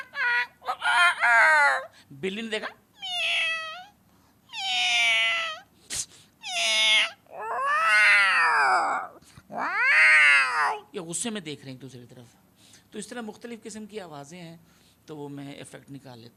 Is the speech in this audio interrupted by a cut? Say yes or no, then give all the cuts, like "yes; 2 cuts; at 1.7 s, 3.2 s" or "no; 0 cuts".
no; 0 cuts